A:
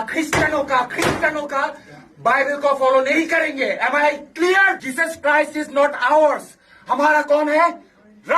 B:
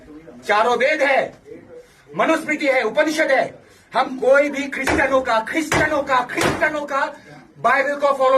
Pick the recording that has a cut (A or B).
A